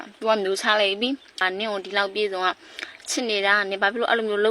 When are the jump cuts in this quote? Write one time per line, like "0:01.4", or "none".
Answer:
0:01.4